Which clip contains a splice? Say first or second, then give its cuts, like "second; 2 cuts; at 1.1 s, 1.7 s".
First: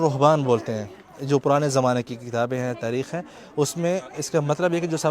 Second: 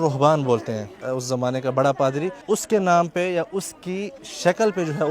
second; 2 cuts; at 1.0 s, 2.3 s